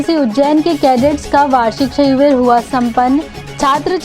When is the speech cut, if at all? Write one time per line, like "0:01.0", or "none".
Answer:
none